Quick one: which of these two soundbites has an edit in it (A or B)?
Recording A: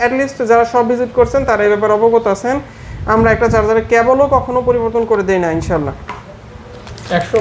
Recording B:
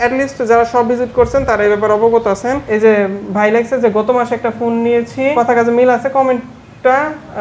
B